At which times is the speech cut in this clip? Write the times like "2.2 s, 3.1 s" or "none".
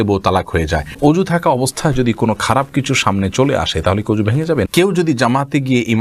1.0 s, 4.7 s